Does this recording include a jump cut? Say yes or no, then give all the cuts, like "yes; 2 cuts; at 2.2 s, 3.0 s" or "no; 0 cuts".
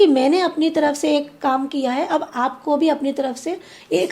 no; 0 cuts